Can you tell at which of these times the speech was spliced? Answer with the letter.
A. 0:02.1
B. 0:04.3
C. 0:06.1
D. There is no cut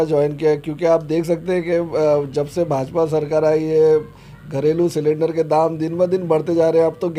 D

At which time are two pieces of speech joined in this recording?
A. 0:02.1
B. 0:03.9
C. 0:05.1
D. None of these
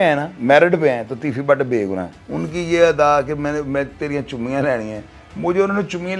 A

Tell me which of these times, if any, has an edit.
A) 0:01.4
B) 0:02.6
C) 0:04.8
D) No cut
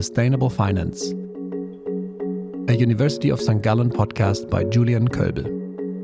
D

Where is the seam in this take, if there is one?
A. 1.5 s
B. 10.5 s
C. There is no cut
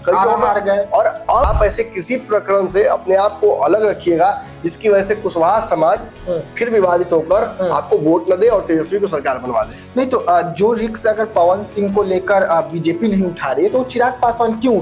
A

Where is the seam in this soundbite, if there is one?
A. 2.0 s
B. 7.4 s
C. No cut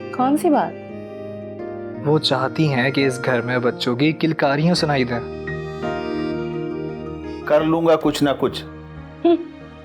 B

